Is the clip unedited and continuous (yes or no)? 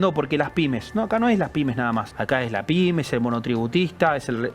no